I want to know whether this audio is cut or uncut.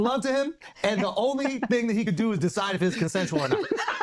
uncut